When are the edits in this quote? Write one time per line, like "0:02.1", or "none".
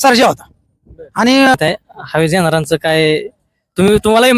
0:01.5